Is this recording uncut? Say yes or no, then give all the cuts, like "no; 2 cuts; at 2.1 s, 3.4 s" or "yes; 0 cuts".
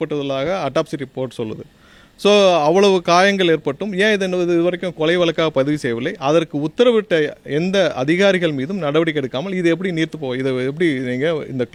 yes; 0 cuts